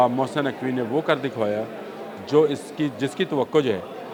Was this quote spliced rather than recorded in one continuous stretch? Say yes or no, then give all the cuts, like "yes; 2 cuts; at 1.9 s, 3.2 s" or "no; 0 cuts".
no; 0 cuts